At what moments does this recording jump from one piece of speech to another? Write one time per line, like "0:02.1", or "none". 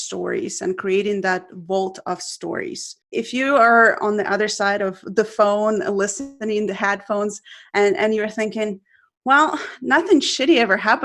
0:02.9